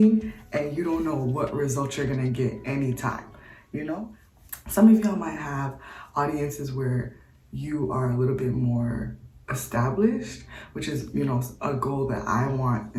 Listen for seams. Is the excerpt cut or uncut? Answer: uncut